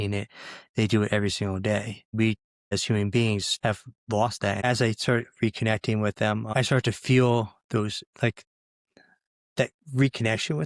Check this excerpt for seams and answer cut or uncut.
cut